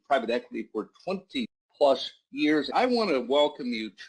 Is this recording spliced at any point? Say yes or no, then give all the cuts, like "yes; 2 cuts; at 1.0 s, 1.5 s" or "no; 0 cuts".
yes; 2 cuts; at 1.6 s, 2.7 s